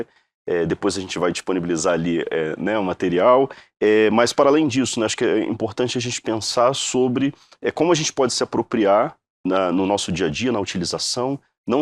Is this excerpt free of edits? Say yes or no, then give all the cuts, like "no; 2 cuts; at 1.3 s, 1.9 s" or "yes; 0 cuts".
yes; 0 cuts